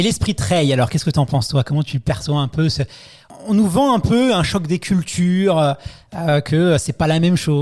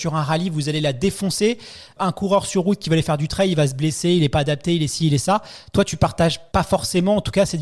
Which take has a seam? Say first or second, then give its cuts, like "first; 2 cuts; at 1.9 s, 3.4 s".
second; 2 cuts; at 1.9 s, 6.4 s